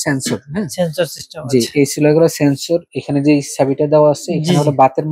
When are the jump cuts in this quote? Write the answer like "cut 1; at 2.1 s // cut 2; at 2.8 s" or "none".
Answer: cut 1; at 2.9 s